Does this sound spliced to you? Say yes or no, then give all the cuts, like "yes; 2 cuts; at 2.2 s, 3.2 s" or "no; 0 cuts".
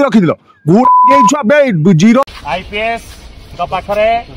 yes; 1 cut; at 2.3 s